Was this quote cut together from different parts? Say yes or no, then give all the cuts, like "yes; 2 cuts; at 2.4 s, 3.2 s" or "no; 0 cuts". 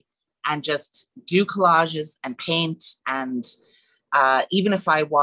no; 0 cuts